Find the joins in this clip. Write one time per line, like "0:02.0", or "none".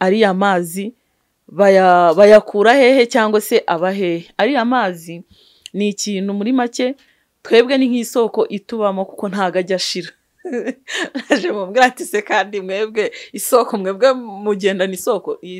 none